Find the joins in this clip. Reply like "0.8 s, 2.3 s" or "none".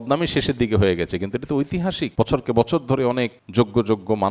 2.1 s, 3.4 s